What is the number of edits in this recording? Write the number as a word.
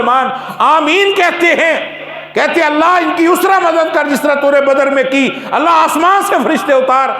zero